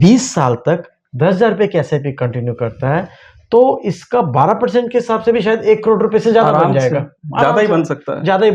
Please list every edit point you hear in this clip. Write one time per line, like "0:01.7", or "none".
none